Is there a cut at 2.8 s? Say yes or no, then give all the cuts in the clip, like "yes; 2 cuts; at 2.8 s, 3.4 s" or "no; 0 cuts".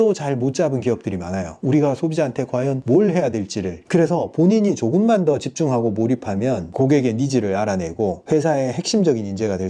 yes; 5 cuts; at 1.5 s, 2.8 s, 3.8 s, 6.7 s, 8.2 s